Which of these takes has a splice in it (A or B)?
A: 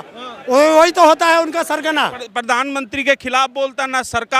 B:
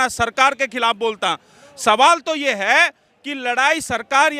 A